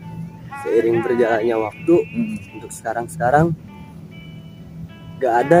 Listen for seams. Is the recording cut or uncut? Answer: uncut